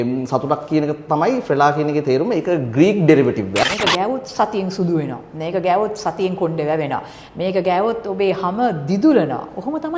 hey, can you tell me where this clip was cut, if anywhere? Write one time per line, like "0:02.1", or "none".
0:03.6